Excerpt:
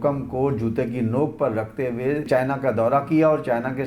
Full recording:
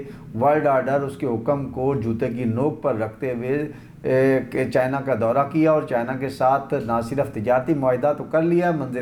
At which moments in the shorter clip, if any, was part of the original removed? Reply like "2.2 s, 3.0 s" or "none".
2.3 s